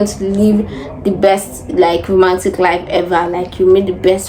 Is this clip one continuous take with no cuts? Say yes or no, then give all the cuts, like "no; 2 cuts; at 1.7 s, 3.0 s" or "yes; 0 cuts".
yes; 0 cuts